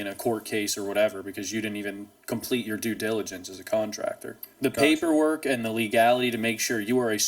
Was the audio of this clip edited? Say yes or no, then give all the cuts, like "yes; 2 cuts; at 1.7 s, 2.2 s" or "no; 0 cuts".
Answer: yes; 1 cut; at 4.5 s